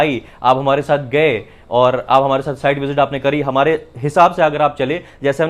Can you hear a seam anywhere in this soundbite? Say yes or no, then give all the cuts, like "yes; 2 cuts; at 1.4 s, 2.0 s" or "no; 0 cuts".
no; 0 cuts